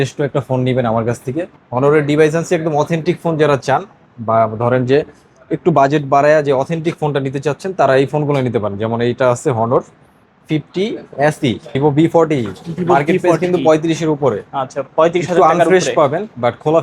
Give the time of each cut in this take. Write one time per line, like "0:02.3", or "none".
0:01.6
0:11.8